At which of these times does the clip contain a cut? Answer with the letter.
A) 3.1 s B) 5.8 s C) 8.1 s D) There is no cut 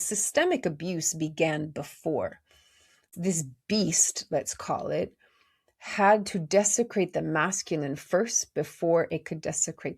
A